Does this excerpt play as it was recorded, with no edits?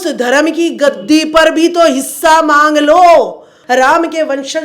no; 1 cut; at 3.5 s

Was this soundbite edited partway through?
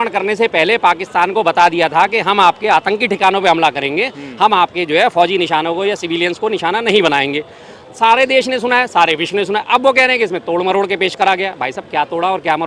no; 0 cuts

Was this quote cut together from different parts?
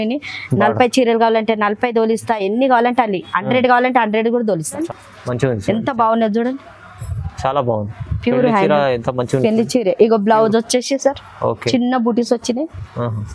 yes; 1 cut; at 5.0 s

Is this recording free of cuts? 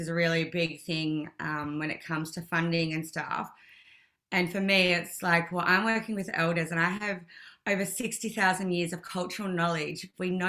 yes; 0 cuts

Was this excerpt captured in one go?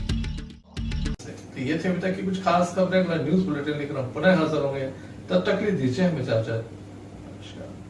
yes; 0 cuts

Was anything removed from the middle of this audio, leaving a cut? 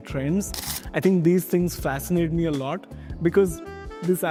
no; 0 cuts

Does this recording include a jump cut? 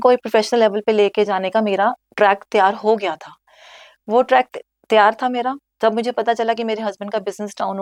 no; 0 cuts

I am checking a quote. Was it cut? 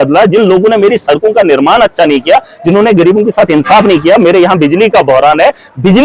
no; 0 cuts

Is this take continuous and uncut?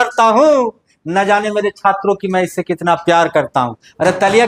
yes; 0 cuts

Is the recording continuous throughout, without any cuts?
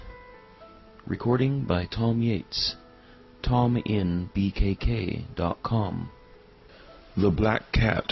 yes; 0 cuts

